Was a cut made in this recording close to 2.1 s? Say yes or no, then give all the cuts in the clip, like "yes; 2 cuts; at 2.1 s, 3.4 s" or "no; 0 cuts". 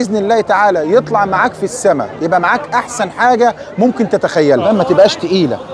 no; 1 cut; at 4.7 s